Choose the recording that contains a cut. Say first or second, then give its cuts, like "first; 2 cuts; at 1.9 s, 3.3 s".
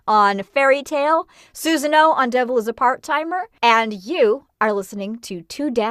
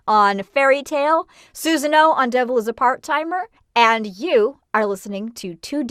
first; 1 cut; at 3.5 s